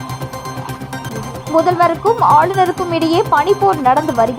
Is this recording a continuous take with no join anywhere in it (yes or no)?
no